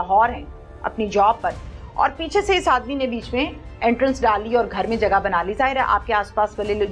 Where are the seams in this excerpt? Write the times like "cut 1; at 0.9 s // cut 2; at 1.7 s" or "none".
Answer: none